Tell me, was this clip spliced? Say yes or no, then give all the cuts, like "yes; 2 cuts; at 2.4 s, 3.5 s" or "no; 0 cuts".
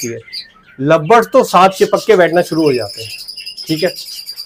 no; 0 cuts